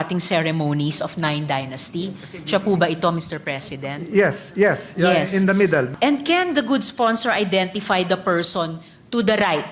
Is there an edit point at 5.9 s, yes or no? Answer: yes